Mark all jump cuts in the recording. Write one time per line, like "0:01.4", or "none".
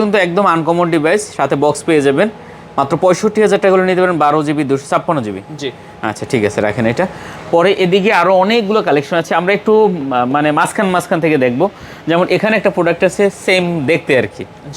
none